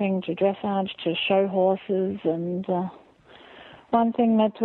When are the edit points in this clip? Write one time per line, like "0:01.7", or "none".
none